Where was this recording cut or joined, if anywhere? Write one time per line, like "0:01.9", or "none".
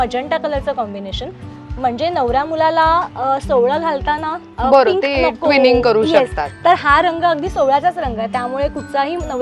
none